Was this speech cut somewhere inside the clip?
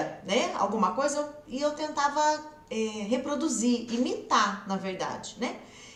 no; 0 cuts

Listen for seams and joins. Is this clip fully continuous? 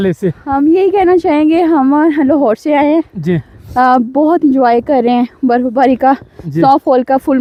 yes; 0 cuts

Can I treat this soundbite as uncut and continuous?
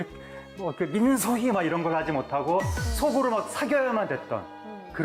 yes; 0 cuts

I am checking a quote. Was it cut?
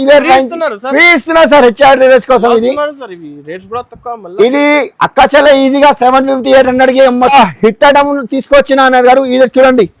yes; 1 cut; at 7.3 s

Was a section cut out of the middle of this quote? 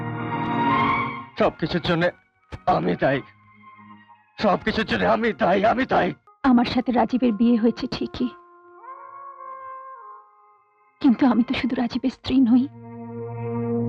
yes; 1 cut; at 6.3 s

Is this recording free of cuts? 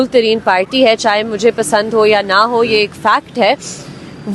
yes; 0 cuts

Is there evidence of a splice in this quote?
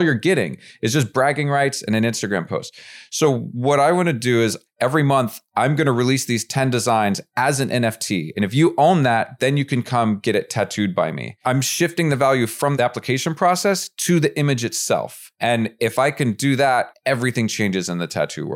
yes; 6 cuts; at 4.6 s, 8.3 s, 11.3 s, 12.7 s, 15.2 s, 16.9 s

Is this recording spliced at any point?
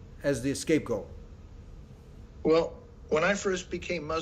no; 0 cuts

